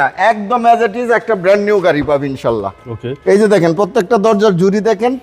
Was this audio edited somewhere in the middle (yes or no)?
no